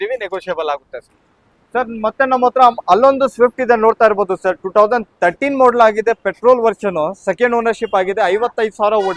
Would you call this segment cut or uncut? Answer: uncut